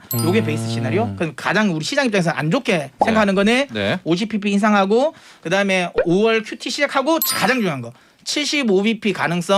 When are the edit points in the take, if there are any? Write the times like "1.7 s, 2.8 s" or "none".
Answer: none